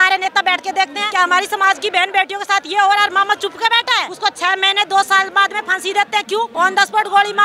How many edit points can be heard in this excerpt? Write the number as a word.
three